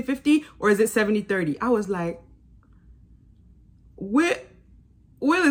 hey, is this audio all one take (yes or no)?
yes